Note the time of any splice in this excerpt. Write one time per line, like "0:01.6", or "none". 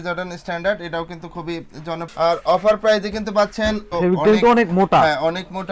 0:02.1
0:03.8